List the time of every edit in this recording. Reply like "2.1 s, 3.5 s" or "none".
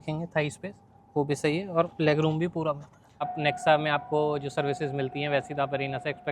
3.3 s